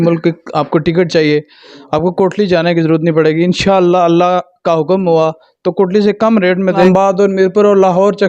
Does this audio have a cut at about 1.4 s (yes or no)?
no